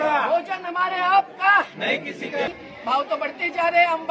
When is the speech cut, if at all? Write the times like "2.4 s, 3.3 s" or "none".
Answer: 2.5 s